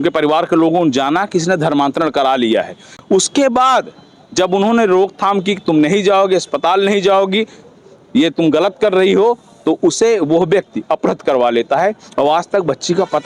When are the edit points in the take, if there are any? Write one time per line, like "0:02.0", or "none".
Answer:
none